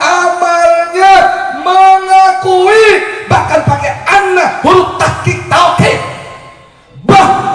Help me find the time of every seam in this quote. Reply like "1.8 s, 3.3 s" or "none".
none